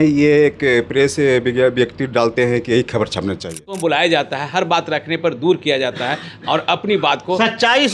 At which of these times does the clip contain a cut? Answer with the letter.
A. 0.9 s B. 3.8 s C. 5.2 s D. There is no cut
B